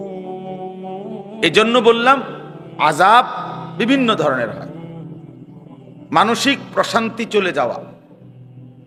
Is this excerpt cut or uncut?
uncut